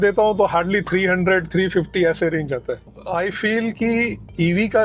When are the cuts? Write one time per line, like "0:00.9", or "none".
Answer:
0:03.0

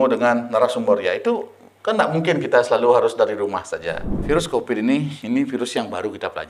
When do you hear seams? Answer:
0:04.2

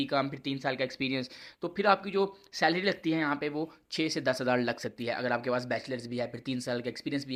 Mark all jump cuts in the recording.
none

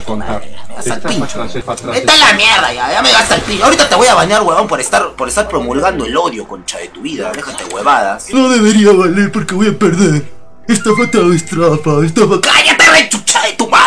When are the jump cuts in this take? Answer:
0:01.6
0:08.3

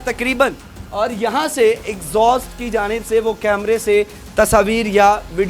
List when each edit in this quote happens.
none

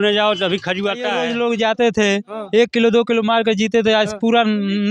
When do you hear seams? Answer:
0:01.2

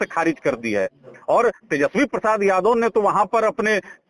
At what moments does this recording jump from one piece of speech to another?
none

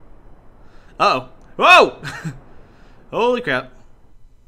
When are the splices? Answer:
0:01.0

